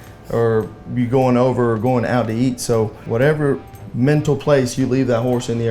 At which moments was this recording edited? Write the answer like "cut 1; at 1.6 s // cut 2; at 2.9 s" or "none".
cut 1; at 3.0 s // cut 2; at 3.8 s